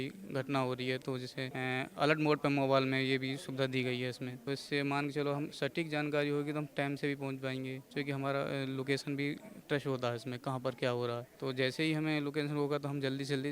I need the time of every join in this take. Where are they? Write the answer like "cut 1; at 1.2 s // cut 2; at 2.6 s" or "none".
cut 1; at 1.5 s // cut 2; at 4.3 s // cut 3; at 7.8 s // cut 4; at 11.3 s